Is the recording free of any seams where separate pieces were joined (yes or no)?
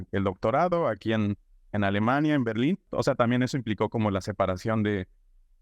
yes